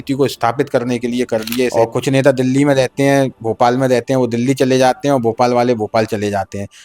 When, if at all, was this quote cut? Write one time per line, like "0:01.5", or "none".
0:01.7